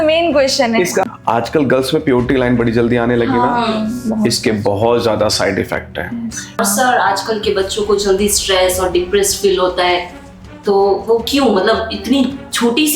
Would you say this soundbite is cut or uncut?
cut